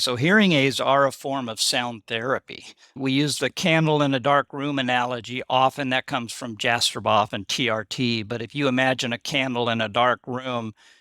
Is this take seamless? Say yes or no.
no